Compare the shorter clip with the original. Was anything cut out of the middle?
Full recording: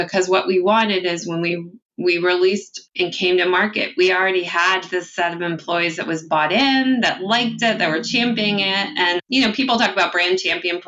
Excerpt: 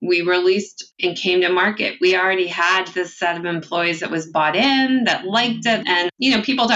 yes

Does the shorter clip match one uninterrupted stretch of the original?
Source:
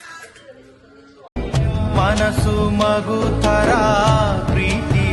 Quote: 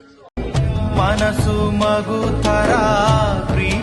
yes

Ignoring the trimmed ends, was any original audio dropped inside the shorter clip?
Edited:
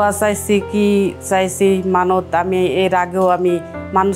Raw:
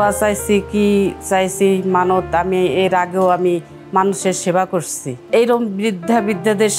no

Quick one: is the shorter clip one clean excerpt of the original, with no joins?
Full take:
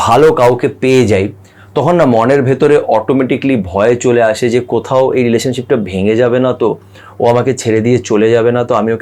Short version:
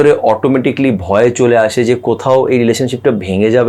yes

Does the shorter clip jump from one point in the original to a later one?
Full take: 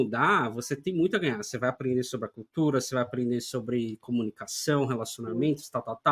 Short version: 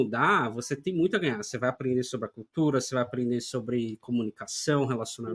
no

